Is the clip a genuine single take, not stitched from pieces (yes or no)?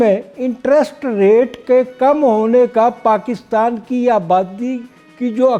yes